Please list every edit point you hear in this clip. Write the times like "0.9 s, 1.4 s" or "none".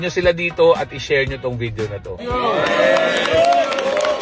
2.1 s

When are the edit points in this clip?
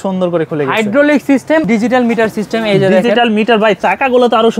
1.6 s

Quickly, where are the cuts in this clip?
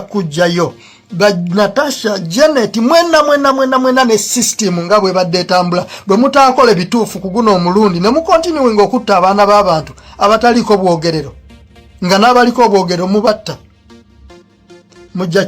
10.8 s

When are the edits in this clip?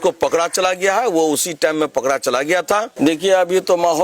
2.9 s

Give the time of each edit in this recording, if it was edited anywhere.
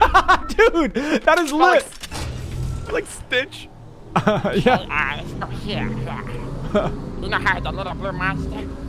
none

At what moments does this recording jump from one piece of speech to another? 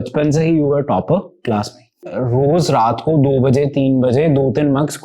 2.1 s

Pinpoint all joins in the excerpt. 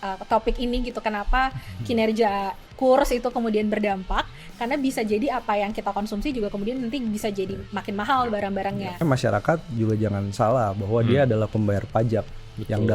9.0 s

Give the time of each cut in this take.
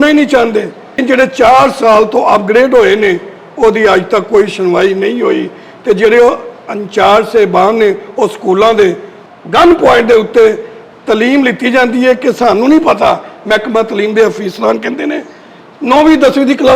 1.0 s

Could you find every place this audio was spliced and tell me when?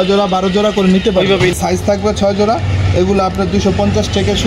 1.6 s

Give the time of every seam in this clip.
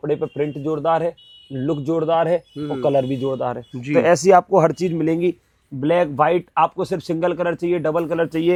none

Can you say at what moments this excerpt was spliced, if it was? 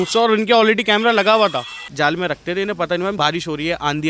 1.8 s, 3.2 s

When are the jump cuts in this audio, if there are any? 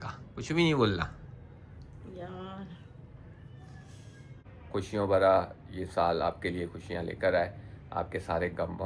4.4 s

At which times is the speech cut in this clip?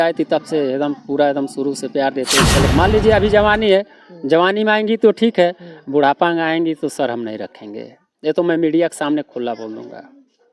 2.7 s

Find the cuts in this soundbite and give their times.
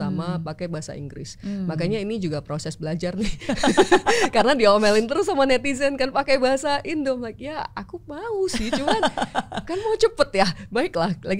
none

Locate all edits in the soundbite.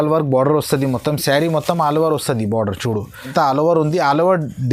3.3 s

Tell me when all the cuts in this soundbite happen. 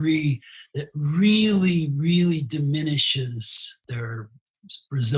3.8 s

